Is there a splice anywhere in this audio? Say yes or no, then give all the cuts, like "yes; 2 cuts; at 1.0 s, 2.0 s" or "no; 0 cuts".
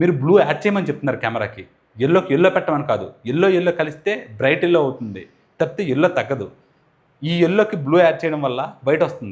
no; 0 cuts